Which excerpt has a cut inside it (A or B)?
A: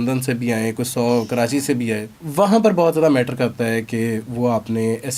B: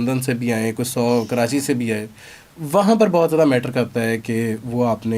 A